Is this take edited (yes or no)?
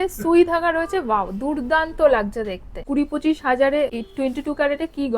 yes